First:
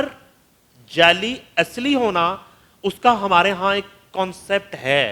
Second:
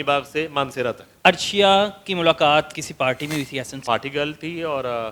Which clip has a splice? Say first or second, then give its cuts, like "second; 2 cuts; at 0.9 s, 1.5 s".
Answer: second; 3 cuts; at 1.1 s, 2.8 s, 3.8 s